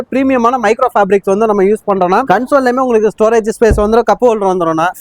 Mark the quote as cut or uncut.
cut